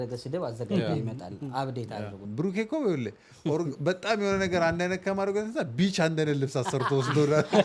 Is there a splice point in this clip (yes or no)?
yes